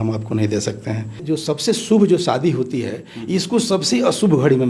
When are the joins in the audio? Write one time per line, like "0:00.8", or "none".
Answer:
0:01.2